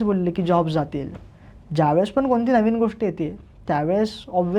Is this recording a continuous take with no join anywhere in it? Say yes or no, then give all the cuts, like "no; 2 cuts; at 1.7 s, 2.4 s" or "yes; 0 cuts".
yes; 0 cuts